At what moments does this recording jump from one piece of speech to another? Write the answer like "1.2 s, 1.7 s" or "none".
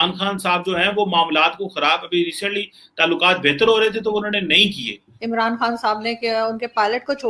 none